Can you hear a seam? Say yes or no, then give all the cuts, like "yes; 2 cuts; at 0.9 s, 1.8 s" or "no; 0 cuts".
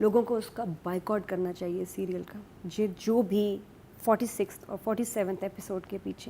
no; 0 cuts